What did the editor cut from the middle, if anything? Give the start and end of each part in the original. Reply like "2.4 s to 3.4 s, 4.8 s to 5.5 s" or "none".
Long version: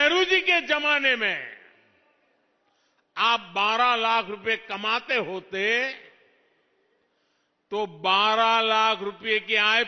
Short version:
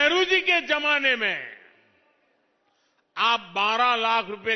none